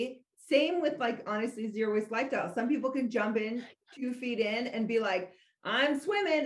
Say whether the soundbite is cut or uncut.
uncut